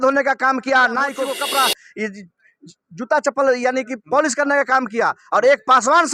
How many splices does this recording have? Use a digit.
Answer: 1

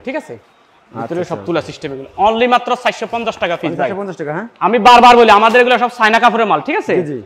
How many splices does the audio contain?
0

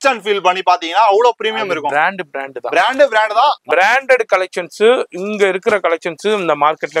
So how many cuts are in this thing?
1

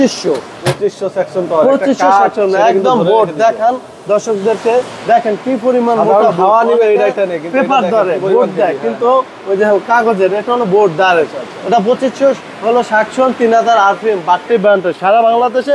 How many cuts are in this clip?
0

